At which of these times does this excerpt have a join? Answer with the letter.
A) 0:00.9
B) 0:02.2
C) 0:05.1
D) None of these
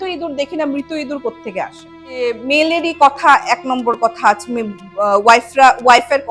B